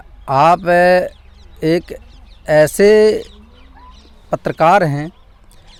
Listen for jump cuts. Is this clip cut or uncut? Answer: uncut